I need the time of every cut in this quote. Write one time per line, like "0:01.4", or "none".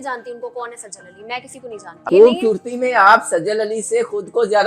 0:02.1